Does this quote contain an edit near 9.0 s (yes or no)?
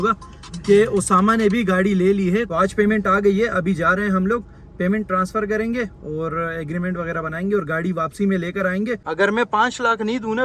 yes